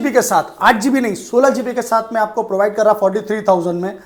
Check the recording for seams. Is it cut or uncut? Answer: uncut